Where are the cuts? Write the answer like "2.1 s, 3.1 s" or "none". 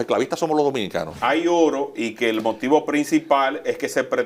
1.2 s